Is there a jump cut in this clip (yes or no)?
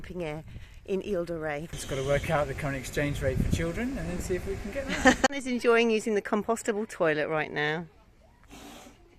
yes